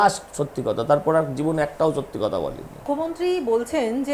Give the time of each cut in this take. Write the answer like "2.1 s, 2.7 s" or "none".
none

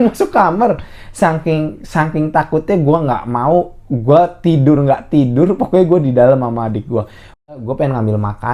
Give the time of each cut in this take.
7.5 s

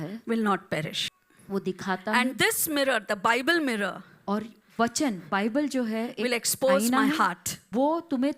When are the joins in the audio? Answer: 1.0 s

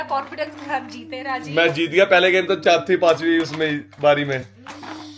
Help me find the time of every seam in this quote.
none

